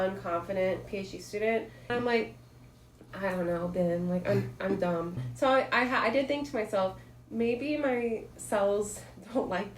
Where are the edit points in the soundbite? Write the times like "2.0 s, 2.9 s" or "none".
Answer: 1.9 s, 5.2 s